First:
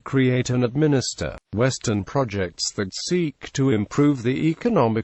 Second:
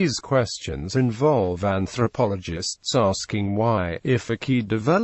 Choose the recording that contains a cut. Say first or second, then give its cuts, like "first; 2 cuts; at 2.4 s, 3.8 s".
first; 1 cut; at 3.6 s